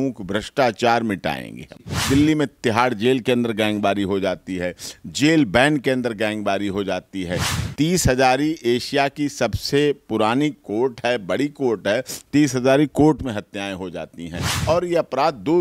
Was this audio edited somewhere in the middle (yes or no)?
yes